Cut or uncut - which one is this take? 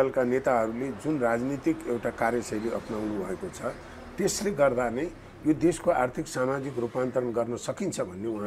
uncut